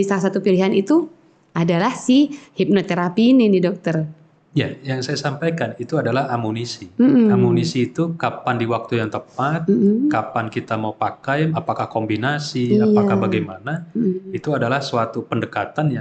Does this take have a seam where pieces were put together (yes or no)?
no